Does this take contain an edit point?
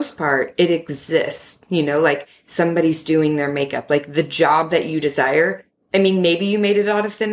no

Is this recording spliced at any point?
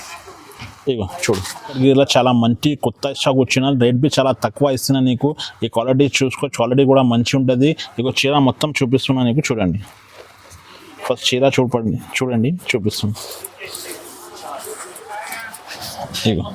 yes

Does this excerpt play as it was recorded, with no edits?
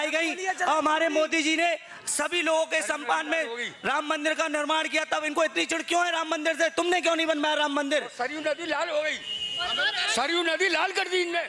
yes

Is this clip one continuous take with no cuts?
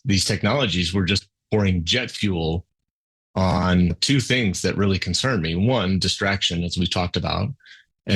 no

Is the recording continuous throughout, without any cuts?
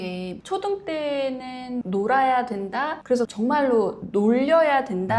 yes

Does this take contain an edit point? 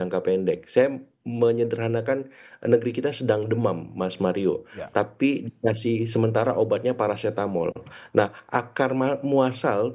no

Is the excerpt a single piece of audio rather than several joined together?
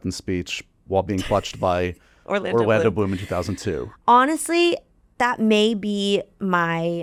yes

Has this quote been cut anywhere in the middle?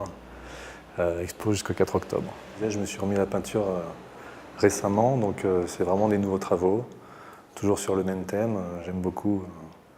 yes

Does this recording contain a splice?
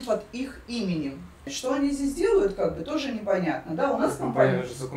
yes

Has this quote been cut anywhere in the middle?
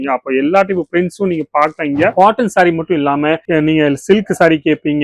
yes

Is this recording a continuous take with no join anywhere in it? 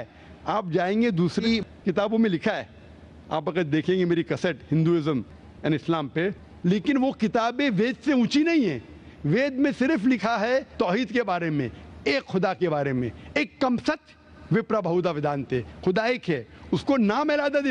yes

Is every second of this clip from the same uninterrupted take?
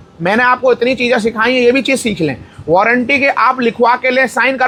yes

